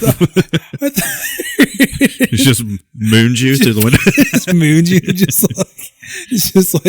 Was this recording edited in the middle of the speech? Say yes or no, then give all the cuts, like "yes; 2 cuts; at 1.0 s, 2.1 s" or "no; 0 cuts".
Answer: yes; 1 cut; at 4.5 s